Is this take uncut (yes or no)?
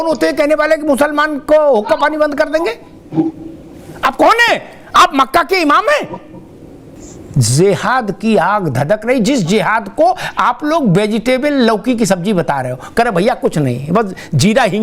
no